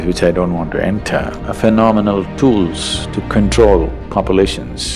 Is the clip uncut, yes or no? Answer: no